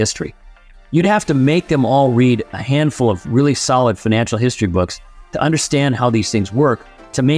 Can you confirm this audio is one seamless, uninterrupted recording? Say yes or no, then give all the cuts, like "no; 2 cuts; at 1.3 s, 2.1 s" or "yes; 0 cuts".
yes; 0 cuts